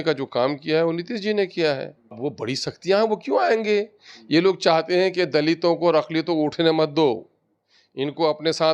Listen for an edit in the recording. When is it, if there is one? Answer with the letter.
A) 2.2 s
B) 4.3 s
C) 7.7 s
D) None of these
A